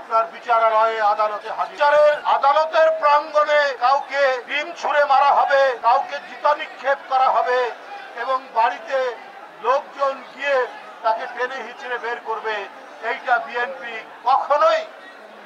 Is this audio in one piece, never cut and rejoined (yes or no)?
yes